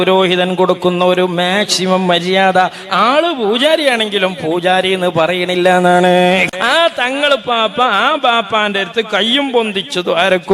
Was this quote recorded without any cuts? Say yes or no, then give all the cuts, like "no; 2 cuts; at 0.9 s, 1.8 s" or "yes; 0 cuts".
no; 1 cut; at 6.5 s